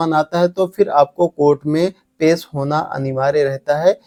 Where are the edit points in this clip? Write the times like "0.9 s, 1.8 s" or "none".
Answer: none